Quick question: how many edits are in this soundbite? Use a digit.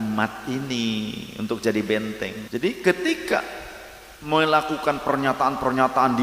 1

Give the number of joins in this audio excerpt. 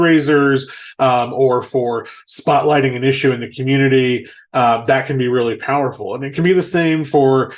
0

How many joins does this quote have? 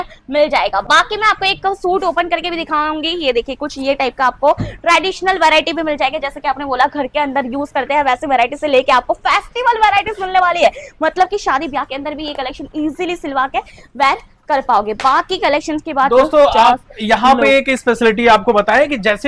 0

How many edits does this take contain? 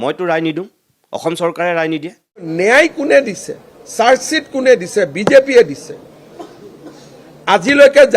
1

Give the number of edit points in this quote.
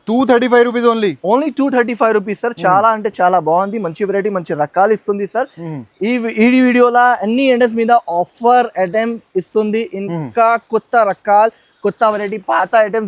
0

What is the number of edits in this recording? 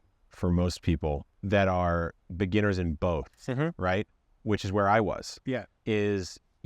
2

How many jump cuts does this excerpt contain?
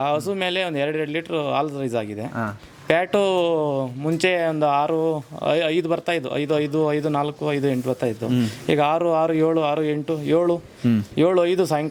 0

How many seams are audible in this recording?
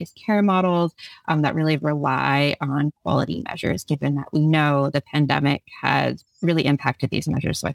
0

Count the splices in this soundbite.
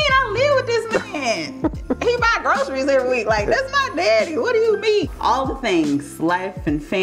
1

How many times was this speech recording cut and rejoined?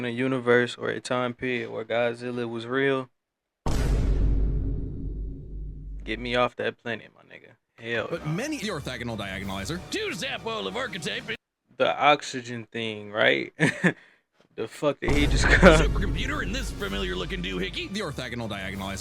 2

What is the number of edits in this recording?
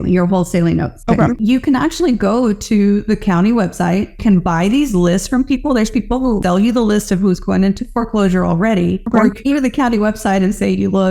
3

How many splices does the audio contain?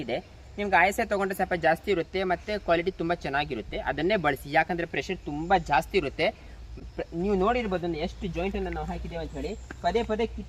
0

